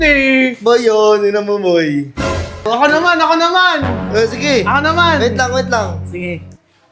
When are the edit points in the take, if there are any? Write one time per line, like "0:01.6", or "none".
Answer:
0:02.7